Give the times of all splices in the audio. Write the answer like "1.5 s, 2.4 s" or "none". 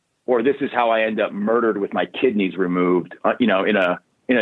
none